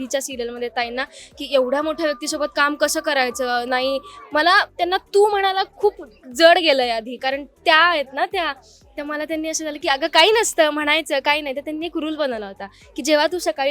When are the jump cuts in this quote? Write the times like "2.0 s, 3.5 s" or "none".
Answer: none